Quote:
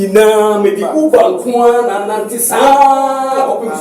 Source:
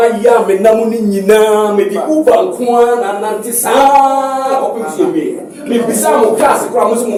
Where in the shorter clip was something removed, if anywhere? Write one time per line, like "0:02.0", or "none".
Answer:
none